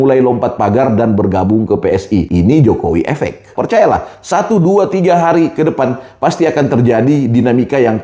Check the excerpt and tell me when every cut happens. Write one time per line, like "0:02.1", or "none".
0:02.3
0:03.5